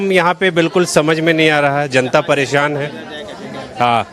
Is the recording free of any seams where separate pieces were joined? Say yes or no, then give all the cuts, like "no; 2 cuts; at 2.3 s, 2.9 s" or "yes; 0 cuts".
yes; 0 cuts